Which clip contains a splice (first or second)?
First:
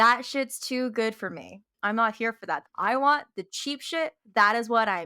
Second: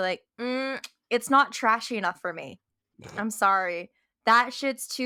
first